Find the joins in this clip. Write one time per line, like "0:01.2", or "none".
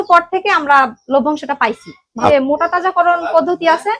0:02.3